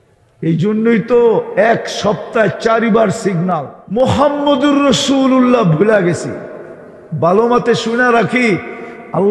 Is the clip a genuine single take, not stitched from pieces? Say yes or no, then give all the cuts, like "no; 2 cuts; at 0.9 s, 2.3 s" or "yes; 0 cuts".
no; 1 cut; at 3.8 s